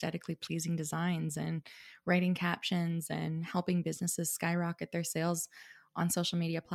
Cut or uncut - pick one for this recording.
uncut